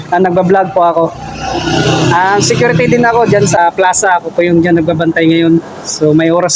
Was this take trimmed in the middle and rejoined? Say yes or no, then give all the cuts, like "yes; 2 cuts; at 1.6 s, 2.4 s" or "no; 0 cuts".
yes; 1 cut; at 3.6 s